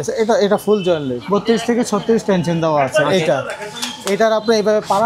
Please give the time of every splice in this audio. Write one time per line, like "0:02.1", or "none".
0:01.1